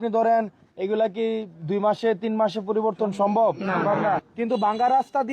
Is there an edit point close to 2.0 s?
no; 1 cut; at 4.3 s

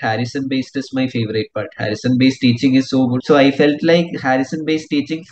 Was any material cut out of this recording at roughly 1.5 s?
no; 1 cut; at 3.2 s

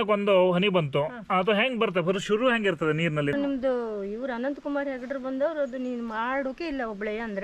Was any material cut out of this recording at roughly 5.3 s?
no; 1 cut; at 3.3 s

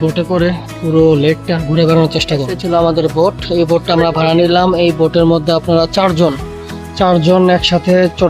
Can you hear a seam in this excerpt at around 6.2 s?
no; 1 cut; at 2.6 s

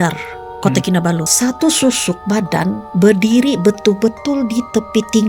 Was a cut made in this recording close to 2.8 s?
yes; 2 cuts; at 1.3 s, 2.8 s

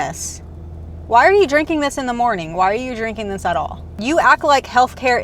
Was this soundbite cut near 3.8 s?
yes; 1 cut; at 3.8 s

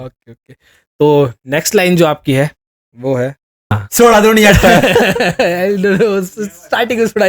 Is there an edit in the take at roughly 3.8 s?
yes; 1 cut; at 3.8 s

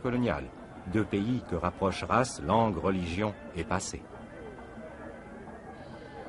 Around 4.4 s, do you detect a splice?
yes; 1 cut; at 4.4 s

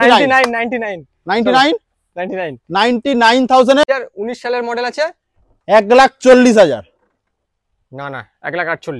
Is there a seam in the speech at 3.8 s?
yes; 1 cut; at 3.8 s

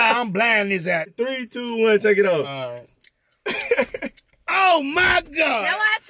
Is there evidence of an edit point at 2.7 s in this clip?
no; 1 cut; at 1.1 s

